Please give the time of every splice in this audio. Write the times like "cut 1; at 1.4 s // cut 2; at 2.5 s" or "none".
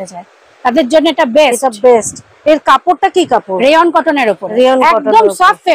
none

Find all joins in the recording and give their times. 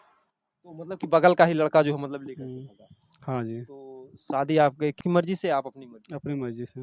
cut 1; at 5.0 s

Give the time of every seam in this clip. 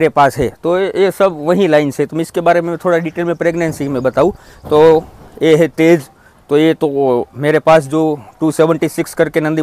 none

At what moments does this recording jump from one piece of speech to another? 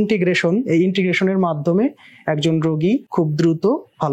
cut 1; at 3.1 s

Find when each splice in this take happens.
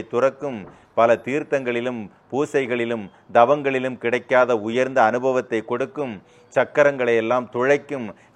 none

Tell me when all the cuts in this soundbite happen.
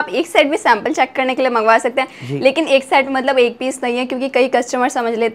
none

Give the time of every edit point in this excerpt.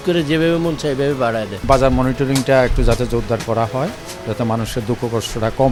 none

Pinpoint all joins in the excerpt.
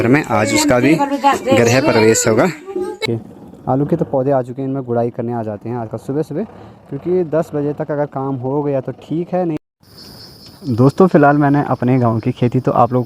cut 1; at 3.0 s // cut 2; at 9.6 s

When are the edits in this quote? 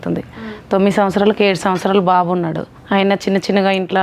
cut 1; at 2.7 s

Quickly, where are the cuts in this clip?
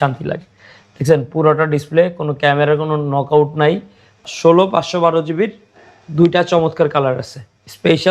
cut 1; at 4.3 s

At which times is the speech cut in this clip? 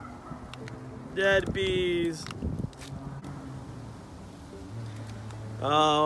cut 1; at 3.2 s

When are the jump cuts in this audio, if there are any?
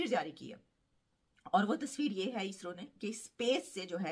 none

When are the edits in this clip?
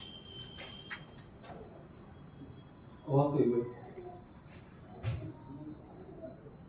none

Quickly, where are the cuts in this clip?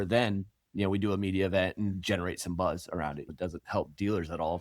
cut 1; at 3.3 s

